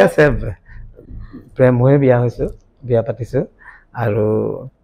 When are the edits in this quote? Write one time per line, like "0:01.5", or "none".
none